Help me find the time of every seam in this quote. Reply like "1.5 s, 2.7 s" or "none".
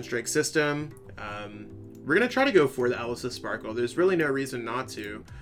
none